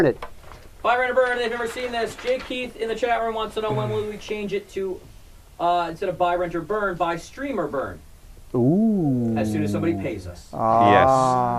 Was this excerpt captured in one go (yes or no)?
no